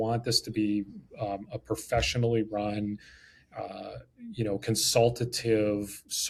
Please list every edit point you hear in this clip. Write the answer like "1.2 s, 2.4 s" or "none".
none